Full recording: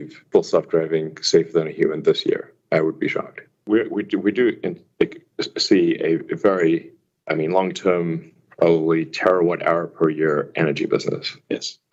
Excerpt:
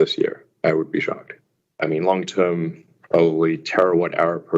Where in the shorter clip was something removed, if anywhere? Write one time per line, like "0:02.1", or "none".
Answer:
0:01.5